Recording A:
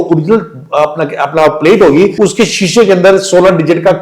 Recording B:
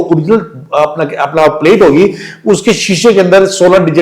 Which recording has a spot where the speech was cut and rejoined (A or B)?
A